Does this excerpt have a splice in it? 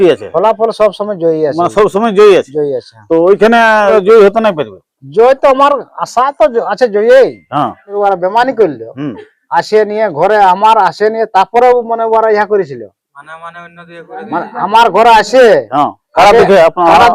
yes; 2 cuts; at 3.9 s, 7.9 s

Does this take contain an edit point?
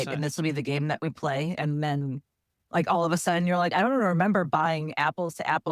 no; 0 cuts

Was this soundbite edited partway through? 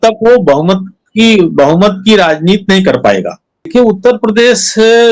yes; 1 cut; at 3.7 s

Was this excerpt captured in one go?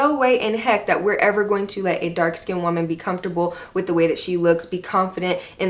yes; 0 cuts

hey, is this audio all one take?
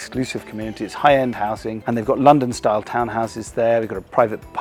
yes; 0 cuts

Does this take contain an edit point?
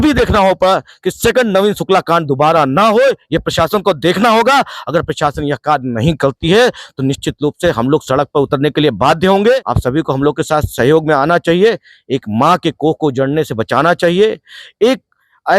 yes; 1 cut; at 9.7 s

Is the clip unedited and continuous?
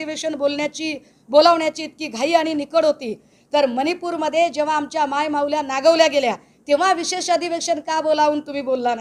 yes; 0 cuts

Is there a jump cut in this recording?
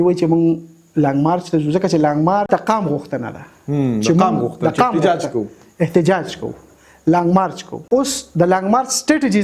yes; 2 cuts; at 2.5 s, 7.8 s

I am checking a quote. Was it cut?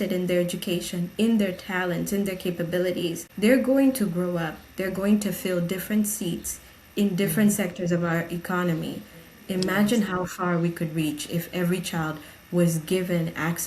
yes; 1 cut; at 3.2 s

